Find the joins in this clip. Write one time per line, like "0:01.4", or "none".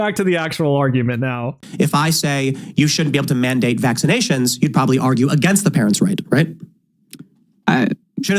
0:01.5